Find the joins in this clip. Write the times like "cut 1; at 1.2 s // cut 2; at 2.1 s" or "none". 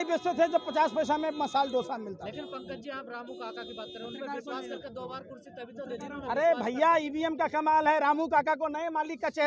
none